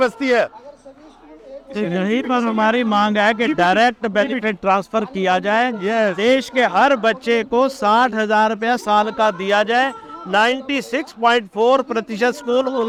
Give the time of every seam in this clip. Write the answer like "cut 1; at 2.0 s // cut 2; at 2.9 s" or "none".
none